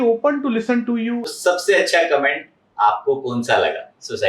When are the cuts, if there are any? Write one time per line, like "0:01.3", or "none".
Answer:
0:01.3